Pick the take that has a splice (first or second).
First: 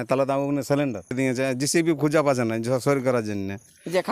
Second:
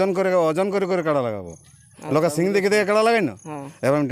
first